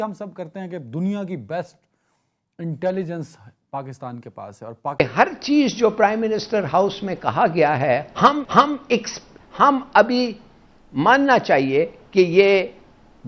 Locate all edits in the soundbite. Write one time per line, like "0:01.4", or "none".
0:05.0